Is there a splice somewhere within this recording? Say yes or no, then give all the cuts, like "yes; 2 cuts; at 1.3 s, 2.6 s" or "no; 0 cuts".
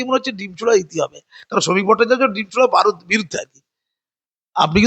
no; 0 cuts